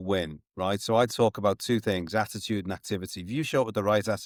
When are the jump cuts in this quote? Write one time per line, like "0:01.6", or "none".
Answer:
none